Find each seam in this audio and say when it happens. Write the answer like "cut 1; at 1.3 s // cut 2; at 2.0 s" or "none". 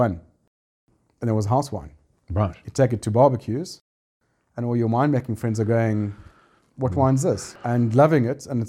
cut 1; at 7.5 s